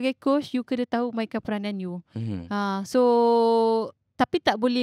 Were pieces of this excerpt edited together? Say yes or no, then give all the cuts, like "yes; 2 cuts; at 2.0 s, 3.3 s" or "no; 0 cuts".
no; 0 cuts